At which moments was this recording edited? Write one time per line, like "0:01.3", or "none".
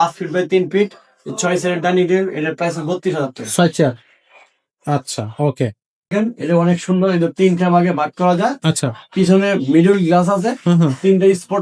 0:06.1